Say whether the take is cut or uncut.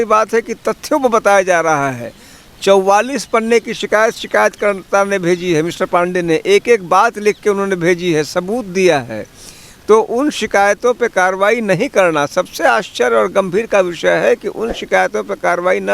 uncut